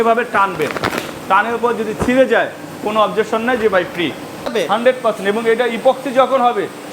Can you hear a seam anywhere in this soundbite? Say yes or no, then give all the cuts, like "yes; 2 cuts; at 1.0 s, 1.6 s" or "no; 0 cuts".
yes; 1 cut; at 4.5 s